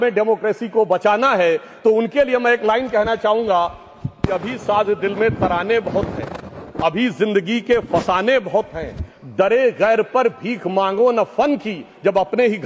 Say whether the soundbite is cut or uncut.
uncut